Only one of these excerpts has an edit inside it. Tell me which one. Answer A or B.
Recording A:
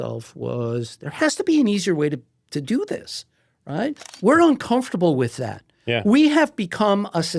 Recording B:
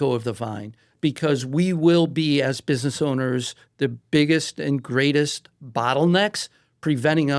A